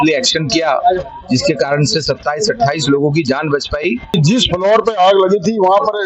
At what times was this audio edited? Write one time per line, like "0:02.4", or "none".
0:04.2